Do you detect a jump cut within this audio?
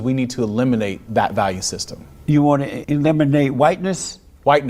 yes; 2 cuts; at 1.0 s, 2.8 s

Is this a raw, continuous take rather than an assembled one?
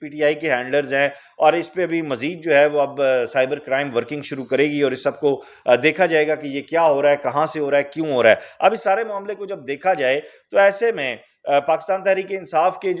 yes; 0 cuts

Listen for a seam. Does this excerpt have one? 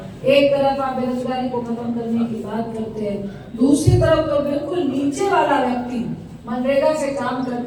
no; 0 cuts

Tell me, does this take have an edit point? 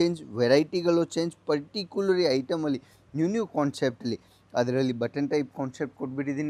no; 0 cuts

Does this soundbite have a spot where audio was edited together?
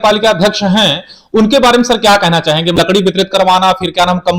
yes; 1 cut; at 2.8 s

